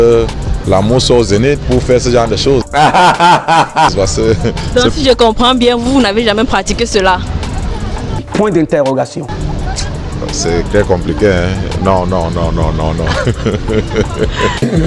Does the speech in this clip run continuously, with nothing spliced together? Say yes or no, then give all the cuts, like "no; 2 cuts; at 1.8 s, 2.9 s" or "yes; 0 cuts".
yes; 0 cuts